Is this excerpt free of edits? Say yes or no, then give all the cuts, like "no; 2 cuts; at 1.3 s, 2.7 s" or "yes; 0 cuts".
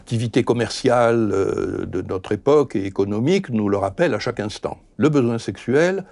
no; 1 cut; at 4.8 s